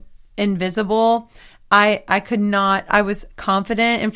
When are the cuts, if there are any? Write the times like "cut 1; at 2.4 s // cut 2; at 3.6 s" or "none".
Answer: none